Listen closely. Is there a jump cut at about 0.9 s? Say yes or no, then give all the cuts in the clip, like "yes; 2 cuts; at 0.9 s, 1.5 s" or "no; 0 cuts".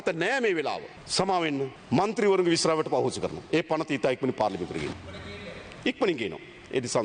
yes; 3 cuts; at 0.9 s, 1.8 s, 4.9 s